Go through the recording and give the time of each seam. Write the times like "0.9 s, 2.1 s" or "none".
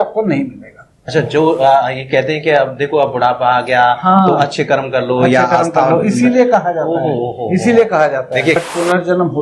1.0 s, 8.6 s

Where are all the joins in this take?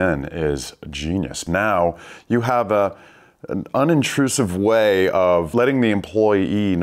1.4 s, 5.5 s

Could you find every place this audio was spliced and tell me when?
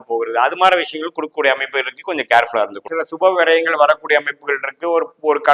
2.9 s

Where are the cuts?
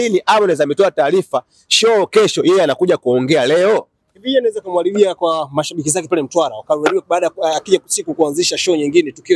none

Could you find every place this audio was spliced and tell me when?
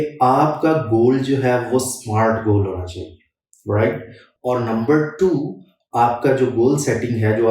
none

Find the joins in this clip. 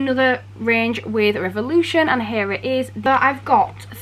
3.0 s

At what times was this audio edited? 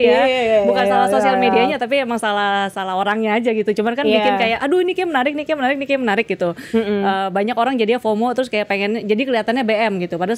none

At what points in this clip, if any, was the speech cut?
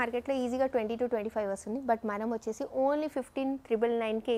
none

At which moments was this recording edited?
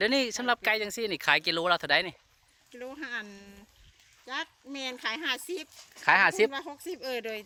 none

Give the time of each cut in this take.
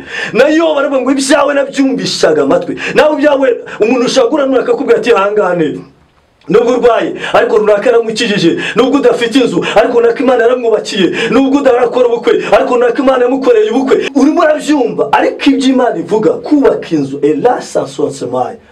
14.1 s

